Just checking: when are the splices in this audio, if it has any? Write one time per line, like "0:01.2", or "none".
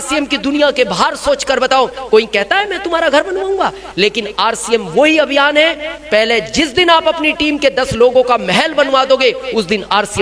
none